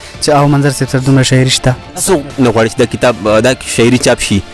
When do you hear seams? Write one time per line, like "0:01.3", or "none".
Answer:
0:02.0